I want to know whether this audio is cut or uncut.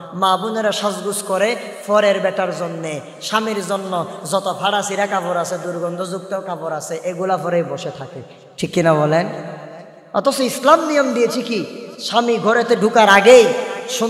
uncut